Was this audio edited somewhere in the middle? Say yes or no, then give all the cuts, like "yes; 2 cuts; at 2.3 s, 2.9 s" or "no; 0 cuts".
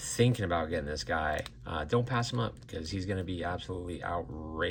no; 0 cuts